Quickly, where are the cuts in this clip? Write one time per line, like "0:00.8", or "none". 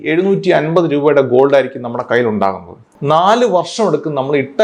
0:02.9